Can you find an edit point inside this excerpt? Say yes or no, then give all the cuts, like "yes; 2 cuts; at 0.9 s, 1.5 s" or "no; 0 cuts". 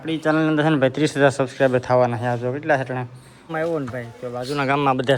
yes; 1 cut; at 3.5 s